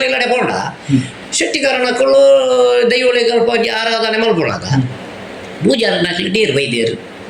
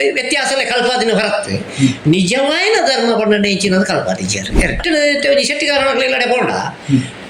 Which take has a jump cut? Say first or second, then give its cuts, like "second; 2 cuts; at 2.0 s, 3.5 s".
second; 1 cut; at 4.8 s